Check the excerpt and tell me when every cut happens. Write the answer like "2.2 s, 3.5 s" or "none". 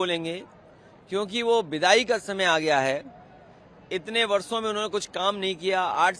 none